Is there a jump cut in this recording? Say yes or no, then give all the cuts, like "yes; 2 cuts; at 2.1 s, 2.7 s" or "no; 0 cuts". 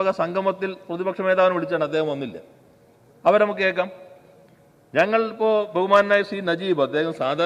no; 0 cuts